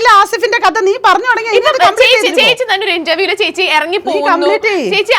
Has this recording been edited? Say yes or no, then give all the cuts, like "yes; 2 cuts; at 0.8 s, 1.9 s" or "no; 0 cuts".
no; 0 cuts